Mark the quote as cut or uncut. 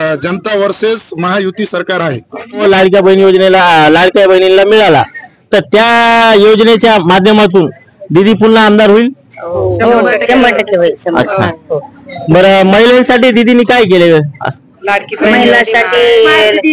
cut